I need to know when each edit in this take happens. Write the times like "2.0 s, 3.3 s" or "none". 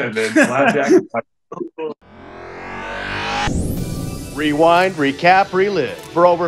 2.1 s